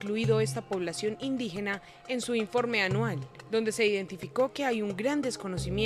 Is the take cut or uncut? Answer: cut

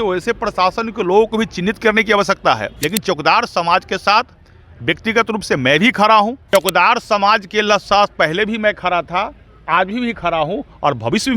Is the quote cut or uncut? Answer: cut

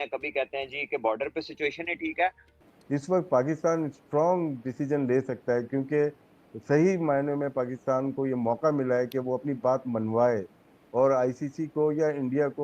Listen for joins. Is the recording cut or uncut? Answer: cut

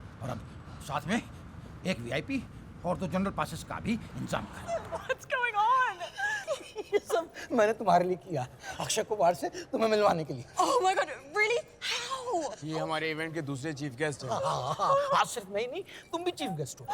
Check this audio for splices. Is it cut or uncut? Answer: cut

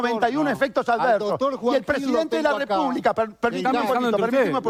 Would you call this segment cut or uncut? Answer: uncut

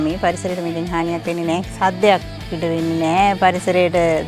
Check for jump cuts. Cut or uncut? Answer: cut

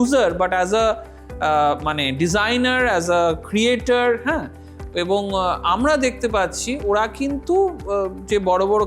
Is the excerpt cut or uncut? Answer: uncut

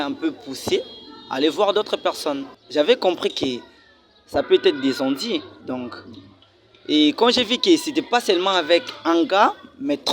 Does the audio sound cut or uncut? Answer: cut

